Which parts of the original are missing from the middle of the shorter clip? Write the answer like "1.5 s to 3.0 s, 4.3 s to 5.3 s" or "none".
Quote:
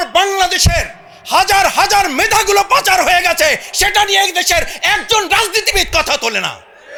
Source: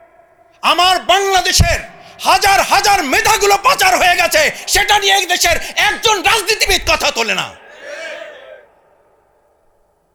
none